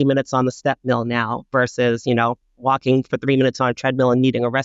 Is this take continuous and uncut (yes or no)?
yes